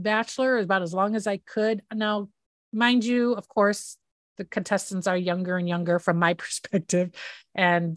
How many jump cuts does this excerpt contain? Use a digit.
0